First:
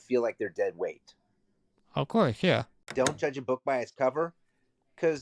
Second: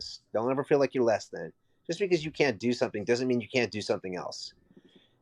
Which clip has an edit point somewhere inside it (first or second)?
first